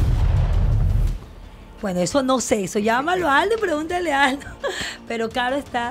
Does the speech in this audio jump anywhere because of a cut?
no; 0 cuts

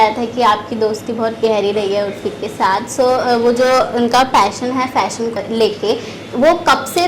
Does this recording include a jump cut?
yes; 1 cut; at 5.3 s

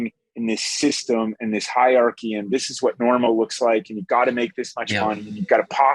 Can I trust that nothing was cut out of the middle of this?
yes; 0 cuts

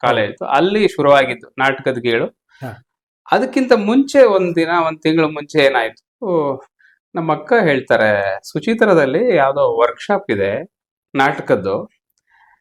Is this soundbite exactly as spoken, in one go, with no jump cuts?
yes; 0 cuts

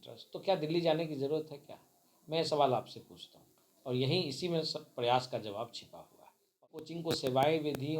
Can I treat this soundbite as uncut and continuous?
no; 1 cut; at 6.9 s

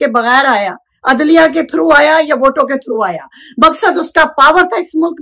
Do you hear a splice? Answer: no; 0 cuts

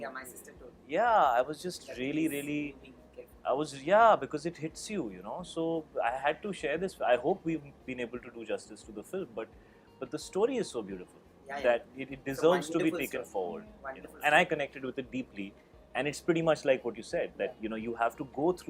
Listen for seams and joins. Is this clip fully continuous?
yes; 0 cuts

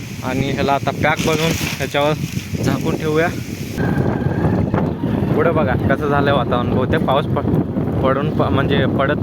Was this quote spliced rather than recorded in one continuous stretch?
yes; 1 cut; at 3.8 s

